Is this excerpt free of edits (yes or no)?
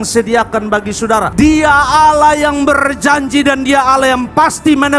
no